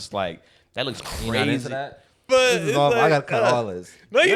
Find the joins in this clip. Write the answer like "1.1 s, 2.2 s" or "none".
2.1 s